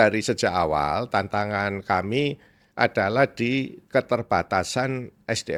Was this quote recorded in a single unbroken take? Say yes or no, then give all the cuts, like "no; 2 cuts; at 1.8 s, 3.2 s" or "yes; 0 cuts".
yes; 0 cuts